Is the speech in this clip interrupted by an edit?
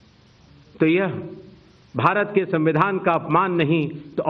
no; 0 cuts

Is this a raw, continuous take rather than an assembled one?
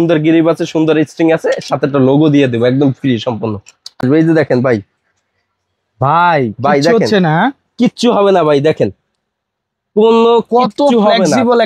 no; 1 cut; at 4.0 s

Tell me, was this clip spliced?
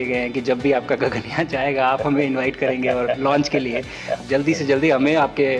yes; 1 cut; at 4.2 s

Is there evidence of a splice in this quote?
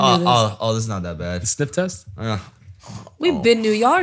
no; 0 cuts

